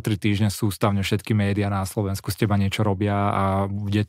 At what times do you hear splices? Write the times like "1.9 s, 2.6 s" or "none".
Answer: none